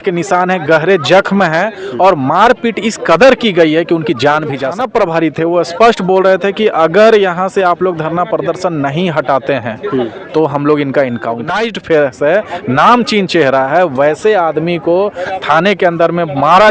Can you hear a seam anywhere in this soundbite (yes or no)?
yes